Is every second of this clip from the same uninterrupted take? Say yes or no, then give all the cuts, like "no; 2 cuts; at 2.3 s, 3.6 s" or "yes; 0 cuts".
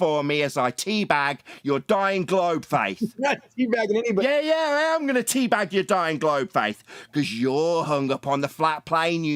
yes; 0 cuts